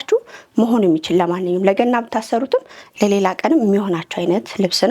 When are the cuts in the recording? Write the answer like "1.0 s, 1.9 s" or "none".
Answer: none